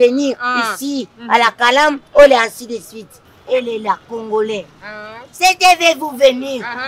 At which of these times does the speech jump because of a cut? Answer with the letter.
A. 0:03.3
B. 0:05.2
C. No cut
A